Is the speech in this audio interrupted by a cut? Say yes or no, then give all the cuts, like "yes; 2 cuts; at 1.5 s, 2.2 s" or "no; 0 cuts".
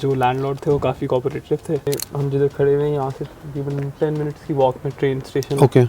yes; 1 cut; at 1.9 s